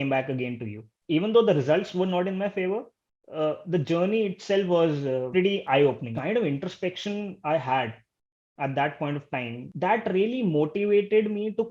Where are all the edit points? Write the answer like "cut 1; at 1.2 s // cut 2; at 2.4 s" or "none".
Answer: cut 1; at 0.9 s // cut 2; at 5.3 s // cut 3; at 6.1 s // cut 4; at 9.7 s